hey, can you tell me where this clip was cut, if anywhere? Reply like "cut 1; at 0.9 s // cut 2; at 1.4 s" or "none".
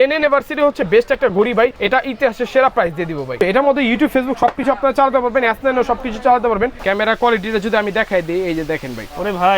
cut 1; at 1.8 s // cut 2; at 3.3 s // cut 3; at 6.8 s

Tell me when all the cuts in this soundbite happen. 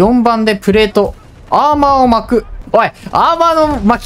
cut 1; at 2.6 s

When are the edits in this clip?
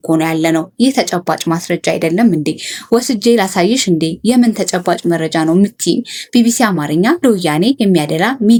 none

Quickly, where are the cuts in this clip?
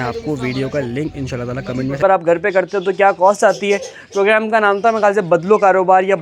cut 1; at 2.0 s

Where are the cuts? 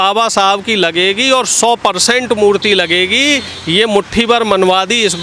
none

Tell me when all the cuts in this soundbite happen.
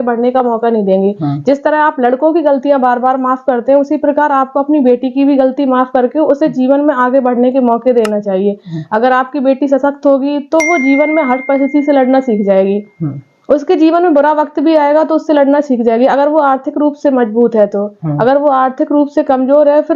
none

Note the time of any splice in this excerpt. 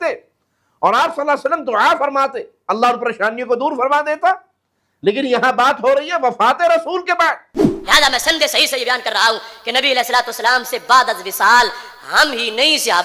cut 1; at 7.7 s

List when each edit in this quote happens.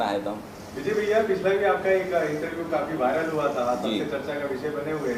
none

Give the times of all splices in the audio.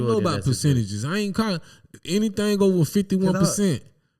none

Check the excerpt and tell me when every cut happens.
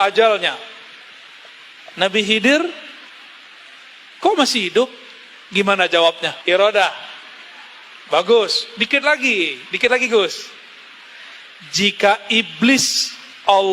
cut 1; at 6.3 s

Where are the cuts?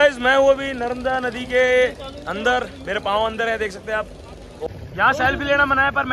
cut 1; at 4.7 s

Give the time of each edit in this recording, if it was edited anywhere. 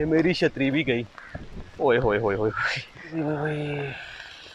cut 1; at 3.1 s

